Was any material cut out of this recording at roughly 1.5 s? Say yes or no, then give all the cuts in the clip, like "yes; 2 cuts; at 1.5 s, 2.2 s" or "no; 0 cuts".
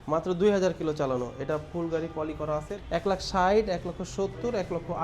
no; 1 cut; at 2.8 s